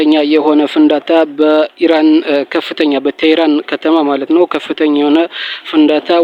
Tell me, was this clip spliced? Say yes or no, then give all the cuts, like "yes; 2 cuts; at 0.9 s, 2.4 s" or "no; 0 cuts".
no; 0 cuts